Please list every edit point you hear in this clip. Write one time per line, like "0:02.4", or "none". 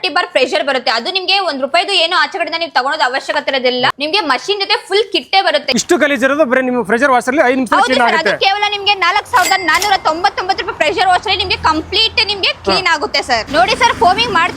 0:03.9
0:05.7
0:13.5